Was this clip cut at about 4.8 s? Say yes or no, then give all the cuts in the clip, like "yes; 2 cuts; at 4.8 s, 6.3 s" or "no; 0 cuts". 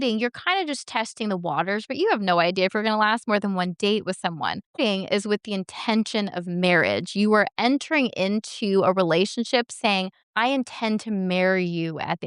yes; 2 cuts; at 4.8 s, 10.2 s